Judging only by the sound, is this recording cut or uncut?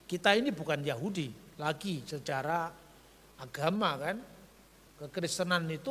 uncut